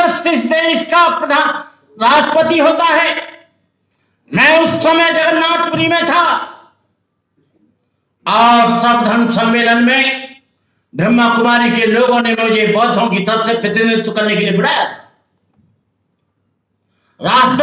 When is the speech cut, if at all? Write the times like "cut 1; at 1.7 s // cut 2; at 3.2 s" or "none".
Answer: none